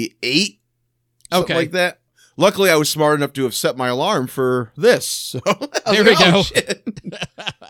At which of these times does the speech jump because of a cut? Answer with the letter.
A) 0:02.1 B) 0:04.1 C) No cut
A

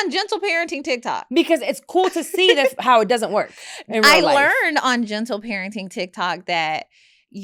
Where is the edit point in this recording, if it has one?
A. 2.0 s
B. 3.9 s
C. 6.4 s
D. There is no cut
D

